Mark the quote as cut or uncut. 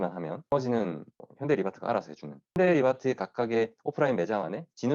cut